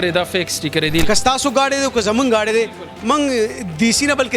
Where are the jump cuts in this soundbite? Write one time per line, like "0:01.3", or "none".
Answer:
0:01.0